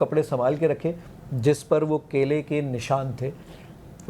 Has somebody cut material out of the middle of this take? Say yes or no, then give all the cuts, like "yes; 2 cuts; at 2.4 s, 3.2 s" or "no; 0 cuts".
no; 0 cuts